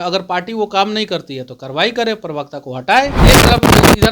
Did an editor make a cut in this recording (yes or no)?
yes